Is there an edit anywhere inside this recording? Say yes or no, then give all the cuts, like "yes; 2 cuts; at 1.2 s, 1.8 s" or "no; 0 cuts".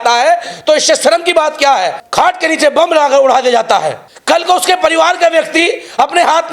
yes; 2 cuts; at 2.0 s, 4.1 s